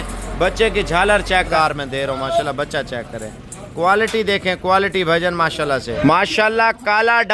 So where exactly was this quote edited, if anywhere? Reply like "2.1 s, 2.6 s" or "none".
1.5 s, 5.9 s

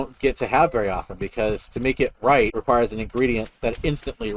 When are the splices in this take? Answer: 2.6 s

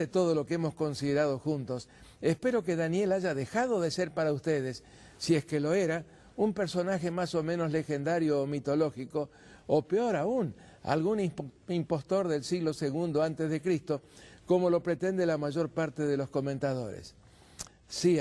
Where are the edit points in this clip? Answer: 12.3 s

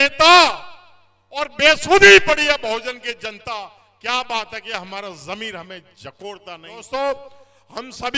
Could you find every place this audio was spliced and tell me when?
6.7 s

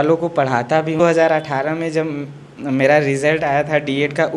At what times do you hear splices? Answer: 1.0 s

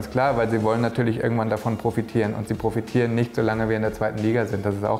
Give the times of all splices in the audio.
none

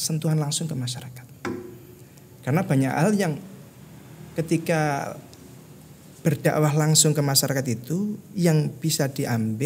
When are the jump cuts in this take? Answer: none

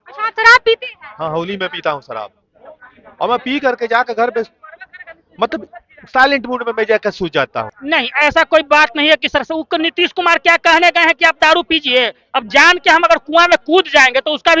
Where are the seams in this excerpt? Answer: 7.7 s

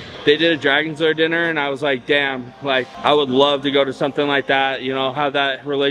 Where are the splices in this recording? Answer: none

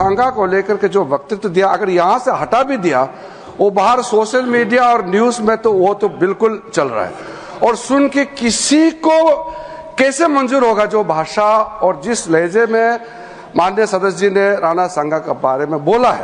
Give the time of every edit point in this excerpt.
none

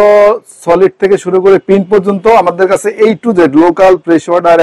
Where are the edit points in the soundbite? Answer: none

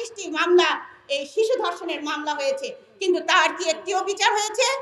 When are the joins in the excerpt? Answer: none

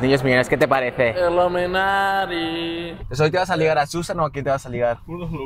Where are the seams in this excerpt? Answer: 2.9 s

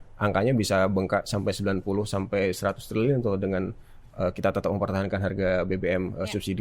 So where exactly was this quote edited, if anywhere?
none

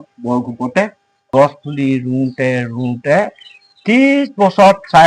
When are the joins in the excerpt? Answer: 1.1 s

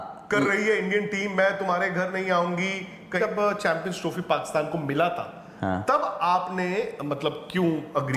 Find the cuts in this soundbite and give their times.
3.2 s

